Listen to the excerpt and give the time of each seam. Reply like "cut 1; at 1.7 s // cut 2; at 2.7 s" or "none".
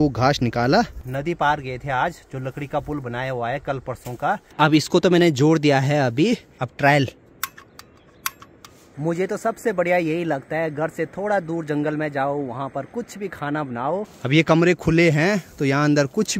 cut 1; at 1.1 s // cut 2; at 4.5 s // cut 3; at 8.9 s // cut 4; at 14.1 s